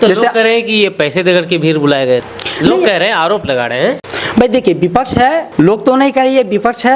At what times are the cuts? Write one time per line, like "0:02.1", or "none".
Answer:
0:02.4
0:04.1
0:05.5